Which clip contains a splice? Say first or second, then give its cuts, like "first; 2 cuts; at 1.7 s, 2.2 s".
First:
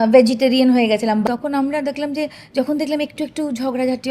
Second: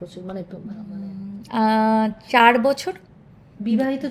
first; 1 cut; at 1.2 s